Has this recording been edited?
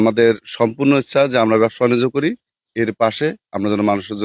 no; 0 cuts

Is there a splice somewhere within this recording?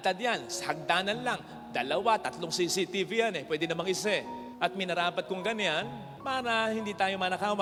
no; 0 cuts

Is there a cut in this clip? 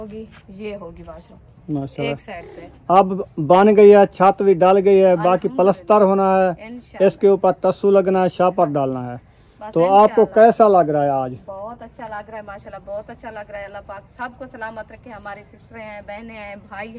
no; 0 cuts

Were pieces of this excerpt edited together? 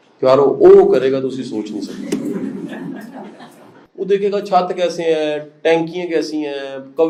no; 0 cuts

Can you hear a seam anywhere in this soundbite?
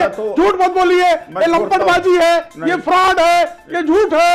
no; 0 cuts

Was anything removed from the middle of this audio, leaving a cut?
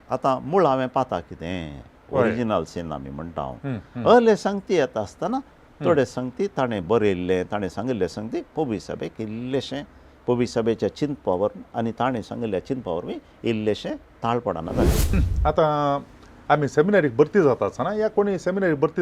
yes; 1 cut; at 15.1 s

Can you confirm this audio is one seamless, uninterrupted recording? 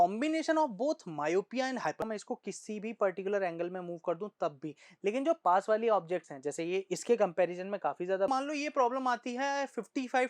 no; 2 cuts; at 2.0 s, 8.3 s

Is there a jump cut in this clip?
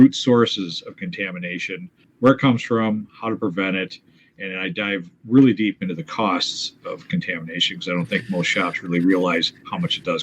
yes; 1 cut; at 2.0 s

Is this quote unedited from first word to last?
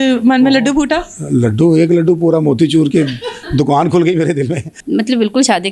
no; 1 cut; at 4.7 s

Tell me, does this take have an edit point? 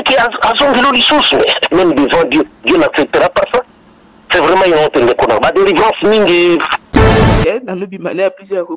yes; 1 cut; at 6.9 s

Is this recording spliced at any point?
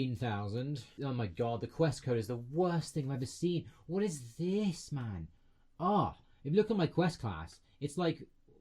yes; 1 cut; at 0.9 s

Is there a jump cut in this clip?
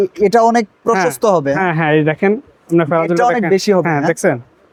no; 0 cuts

